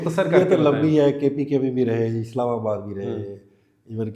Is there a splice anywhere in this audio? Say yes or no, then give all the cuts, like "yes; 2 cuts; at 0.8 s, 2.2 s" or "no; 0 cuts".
no; 0 cuts